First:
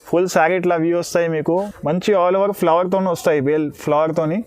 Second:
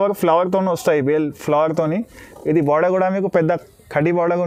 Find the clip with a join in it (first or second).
first